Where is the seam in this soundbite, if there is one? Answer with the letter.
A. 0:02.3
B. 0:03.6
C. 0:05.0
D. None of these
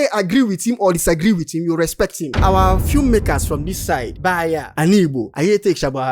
A